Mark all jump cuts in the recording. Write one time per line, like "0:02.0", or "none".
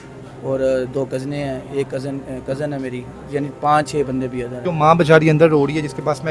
0:04.5